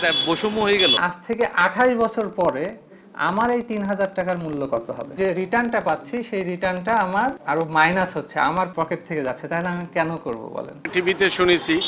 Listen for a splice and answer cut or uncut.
cut